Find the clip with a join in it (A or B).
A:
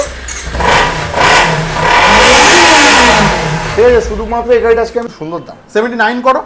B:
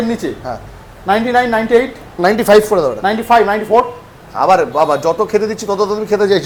A